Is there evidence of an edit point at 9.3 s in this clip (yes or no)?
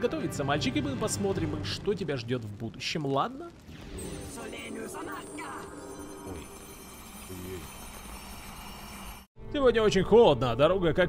yes